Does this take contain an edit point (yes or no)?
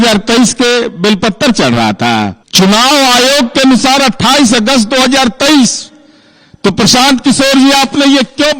yes